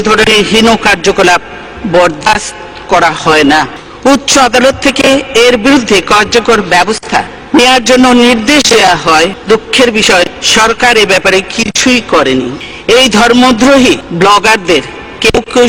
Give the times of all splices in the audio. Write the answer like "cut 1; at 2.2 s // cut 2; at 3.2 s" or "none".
cut 1; at 3.8 s // cut 2; at 7.4 s // cut 3; at 9.4 s // cut 4; at 10.4 s // cut 5; at 12.7 s // cut 6; at 14.1 s